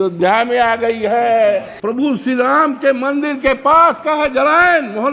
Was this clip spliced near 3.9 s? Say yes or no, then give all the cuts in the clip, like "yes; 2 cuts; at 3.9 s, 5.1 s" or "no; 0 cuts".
no; 1 cut; at 1.7 s